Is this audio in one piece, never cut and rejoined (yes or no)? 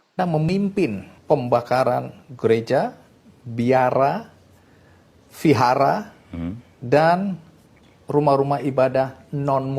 yes